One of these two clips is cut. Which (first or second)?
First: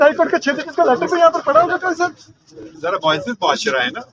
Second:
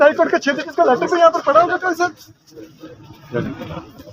first